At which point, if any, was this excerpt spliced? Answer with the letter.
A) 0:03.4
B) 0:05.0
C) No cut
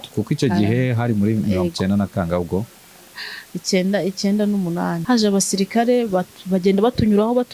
B